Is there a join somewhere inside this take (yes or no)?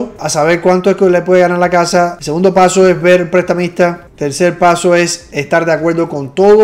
no